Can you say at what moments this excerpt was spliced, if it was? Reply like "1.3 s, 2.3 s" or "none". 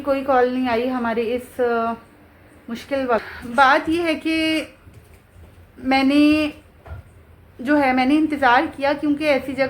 3.4 s

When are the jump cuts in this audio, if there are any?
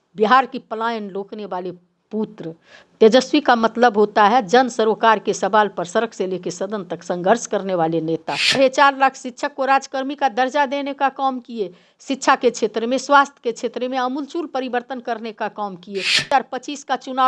8.6 s, 16.3 s

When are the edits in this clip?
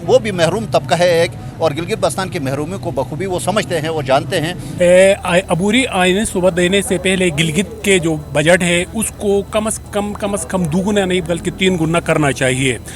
4.6 s

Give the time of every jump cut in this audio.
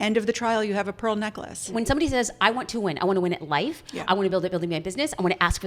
1.7 s

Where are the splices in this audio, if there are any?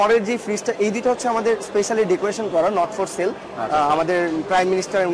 none

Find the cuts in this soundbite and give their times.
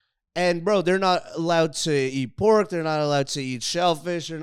none

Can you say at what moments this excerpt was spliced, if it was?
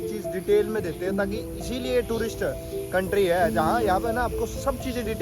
none

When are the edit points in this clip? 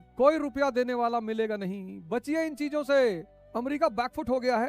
3.4 s

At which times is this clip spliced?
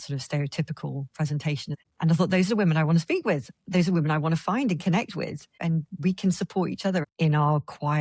1.7 s, 7.1 s

